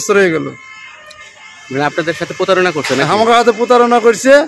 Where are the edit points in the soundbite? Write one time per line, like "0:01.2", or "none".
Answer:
none